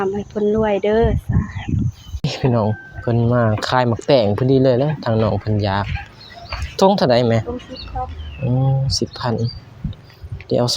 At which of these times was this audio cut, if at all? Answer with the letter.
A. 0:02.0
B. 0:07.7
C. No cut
A